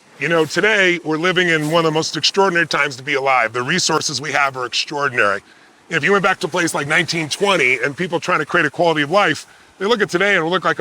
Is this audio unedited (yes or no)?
no